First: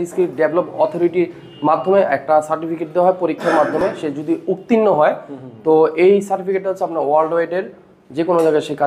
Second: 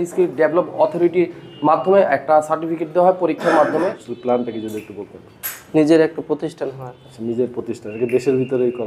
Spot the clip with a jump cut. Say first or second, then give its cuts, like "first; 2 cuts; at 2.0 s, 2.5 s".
second; 1 cut; at 3.8 s